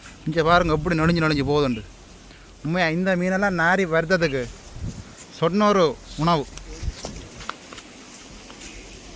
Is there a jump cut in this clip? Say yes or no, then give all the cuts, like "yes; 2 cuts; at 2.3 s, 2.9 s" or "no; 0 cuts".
no; 0 cuts